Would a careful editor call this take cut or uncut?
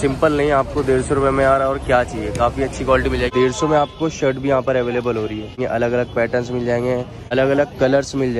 cut